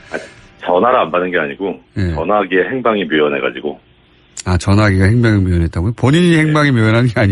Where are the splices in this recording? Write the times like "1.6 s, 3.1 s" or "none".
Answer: 1.3 s